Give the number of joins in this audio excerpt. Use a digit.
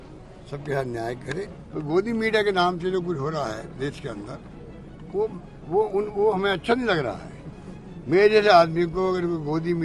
1